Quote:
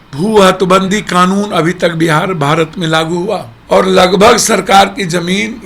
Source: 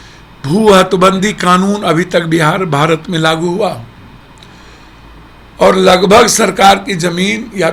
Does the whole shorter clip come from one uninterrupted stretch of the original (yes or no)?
no